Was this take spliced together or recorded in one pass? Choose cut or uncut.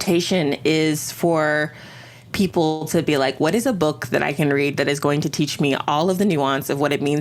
uncut